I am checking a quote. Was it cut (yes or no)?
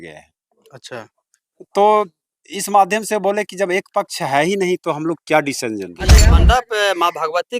yes